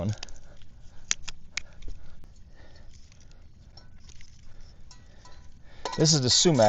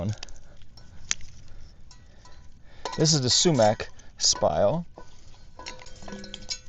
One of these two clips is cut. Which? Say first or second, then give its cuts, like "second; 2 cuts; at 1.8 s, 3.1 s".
second; 1 cut; at 1.2 s